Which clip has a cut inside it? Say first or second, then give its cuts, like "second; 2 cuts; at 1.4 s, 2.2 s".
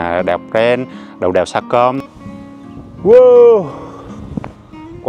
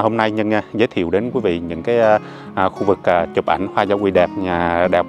first; 1 cut; at 2.5 s